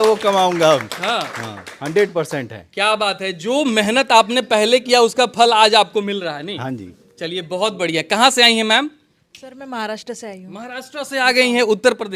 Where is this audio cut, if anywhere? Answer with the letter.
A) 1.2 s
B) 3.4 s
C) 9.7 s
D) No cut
D